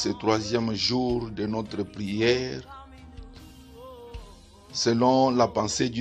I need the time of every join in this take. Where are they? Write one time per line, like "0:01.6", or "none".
0:02.6
0:04.8